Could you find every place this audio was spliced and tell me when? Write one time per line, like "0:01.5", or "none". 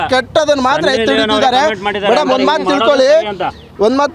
none